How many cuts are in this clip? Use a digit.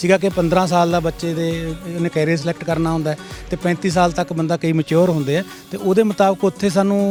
0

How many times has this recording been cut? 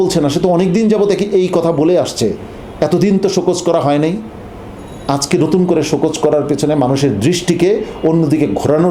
0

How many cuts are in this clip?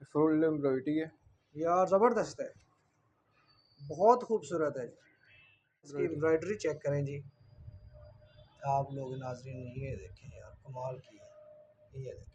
1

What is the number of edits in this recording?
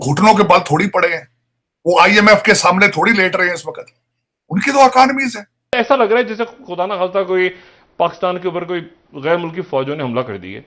1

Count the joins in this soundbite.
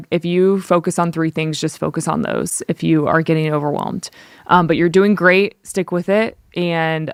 0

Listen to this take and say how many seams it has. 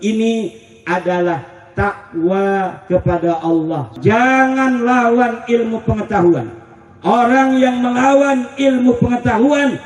1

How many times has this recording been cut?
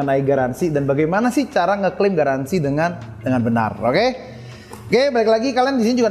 0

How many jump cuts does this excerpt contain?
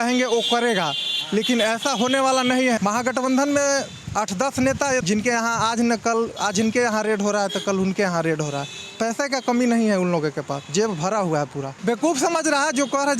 3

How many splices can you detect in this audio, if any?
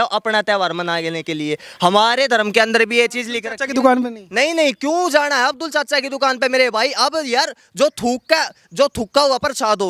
0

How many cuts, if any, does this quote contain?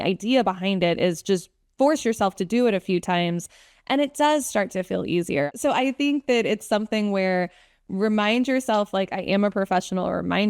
1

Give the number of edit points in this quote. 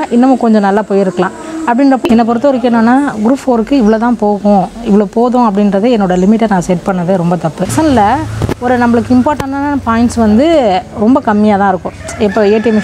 2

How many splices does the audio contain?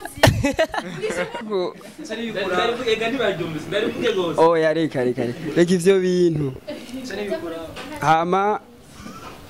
1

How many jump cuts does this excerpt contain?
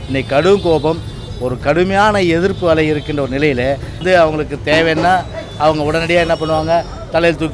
1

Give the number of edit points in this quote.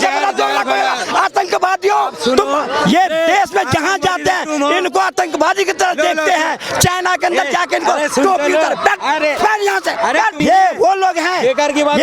1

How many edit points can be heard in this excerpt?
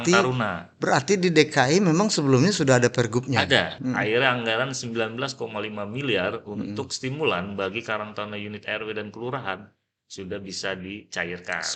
1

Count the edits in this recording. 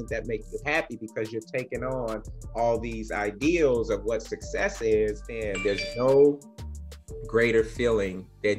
1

